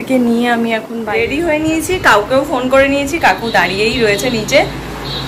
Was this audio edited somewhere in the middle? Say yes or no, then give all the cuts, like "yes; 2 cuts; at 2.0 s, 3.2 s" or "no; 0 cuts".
yes; 1 cut; at 1.1 s